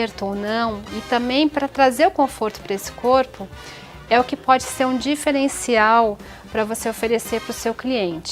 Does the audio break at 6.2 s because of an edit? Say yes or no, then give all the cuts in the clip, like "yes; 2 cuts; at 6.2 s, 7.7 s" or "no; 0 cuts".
no; 0 cuts